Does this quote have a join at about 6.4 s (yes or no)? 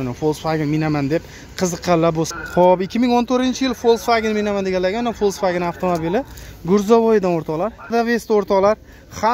no